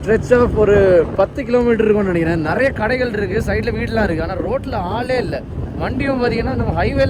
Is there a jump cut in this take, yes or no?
yes